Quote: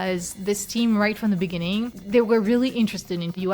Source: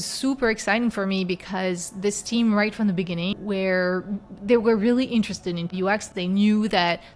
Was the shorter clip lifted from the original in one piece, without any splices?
no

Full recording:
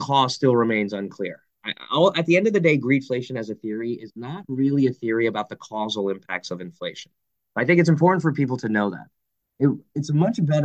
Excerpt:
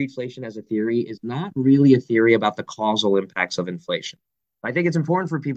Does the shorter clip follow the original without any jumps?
yes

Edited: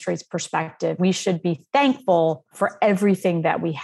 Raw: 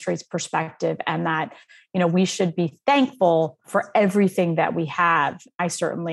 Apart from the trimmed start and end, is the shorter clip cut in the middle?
yes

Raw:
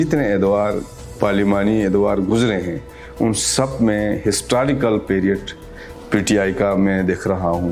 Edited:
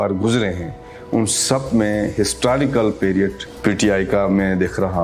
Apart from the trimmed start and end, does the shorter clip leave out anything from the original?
yes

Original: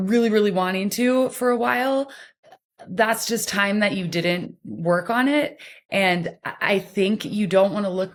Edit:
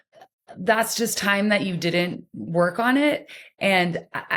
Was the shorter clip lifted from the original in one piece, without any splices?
yes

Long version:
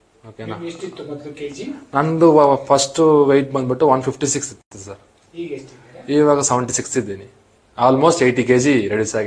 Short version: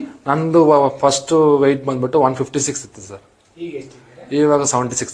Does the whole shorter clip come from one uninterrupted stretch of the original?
no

